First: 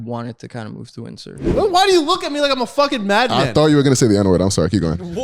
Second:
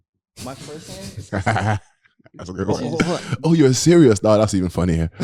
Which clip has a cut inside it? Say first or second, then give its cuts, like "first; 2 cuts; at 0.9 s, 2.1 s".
first; 1 cut; at 1.4 s